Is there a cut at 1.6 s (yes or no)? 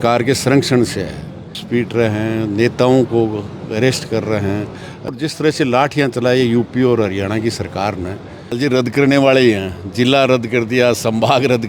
yes